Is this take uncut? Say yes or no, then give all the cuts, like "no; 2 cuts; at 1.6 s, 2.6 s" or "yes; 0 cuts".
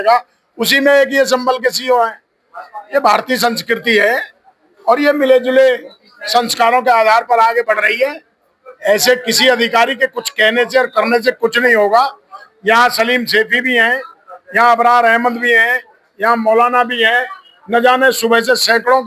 yes; 0 cuts